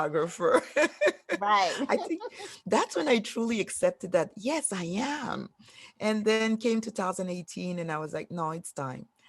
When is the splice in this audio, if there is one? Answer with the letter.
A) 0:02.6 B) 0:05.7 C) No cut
C